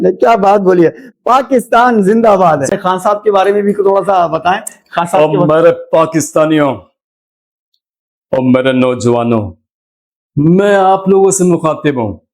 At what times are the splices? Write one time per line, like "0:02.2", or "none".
0:02.7